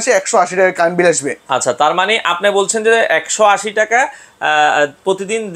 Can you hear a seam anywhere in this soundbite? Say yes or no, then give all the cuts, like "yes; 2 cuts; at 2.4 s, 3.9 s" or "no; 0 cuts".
no; 0 cuts